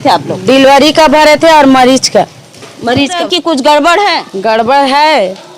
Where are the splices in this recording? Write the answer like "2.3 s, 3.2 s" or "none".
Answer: 3.2 s